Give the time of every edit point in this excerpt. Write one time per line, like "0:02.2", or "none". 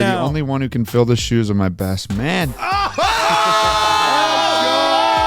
none